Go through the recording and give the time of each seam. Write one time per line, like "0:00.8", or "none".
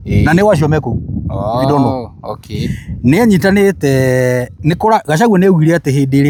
none